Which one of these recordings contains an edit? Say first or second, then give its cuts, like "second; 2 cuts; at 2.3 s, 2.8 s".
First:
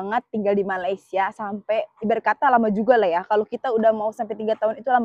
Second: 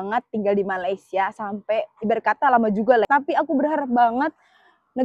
second; 1 cut; at 3.1 s